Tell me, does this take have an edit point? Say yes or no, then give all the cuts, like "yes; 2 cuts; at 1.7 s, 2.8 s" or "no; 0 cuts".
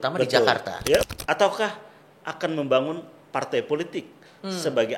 yes; 1 cut; at 1.1 s